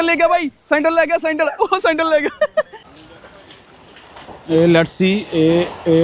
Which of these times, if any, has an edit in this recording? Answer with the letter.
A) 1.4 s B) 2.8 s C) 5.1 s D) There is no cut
B